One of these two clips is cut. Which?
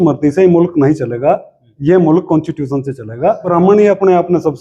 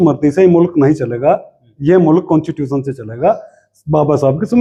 first; 1 cut; at 3.4 s

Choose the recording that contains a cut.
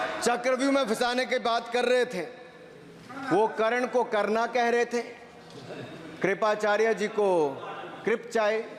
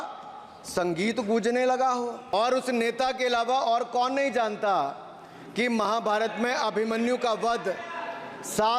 second; 1 cut; at 2.3 s

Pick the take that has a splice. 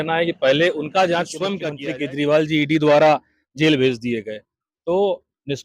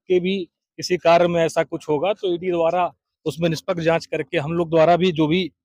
first; 1 cut; at 1.7 s

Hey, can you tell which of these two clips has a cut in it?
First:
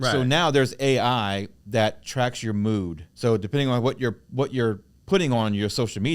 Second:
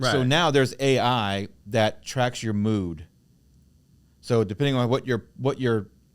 first; 2 cuts; at 3.0 s, 4.9 s

